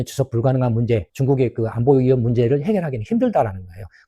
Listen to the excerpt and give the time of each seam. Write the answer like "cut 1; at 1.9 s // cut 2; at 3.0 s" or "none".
cut 1; at 1.1 s

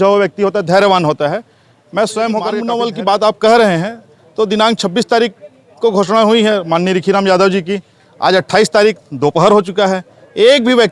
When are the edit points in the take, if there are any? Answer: cut 1; at 2.7 s

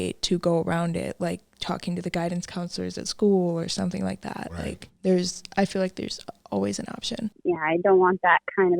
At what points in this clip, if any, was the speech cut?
cut 1; at 4.9 s // cut 2; at 7.3 s

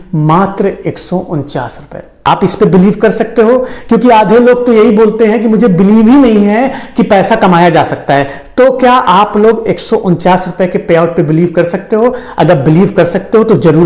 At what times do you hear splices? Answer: cut 1; at 2.3 s

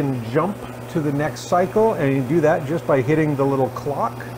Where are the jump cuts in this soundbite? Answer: none

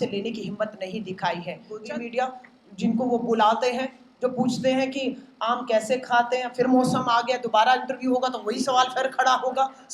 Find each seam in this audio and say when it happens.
cut 1; at 1.8 s

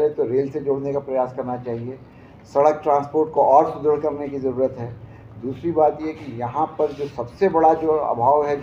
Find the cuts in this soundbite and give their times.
none

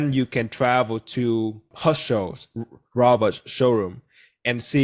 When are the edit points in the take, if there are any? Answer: cut 1; at 1.7 s

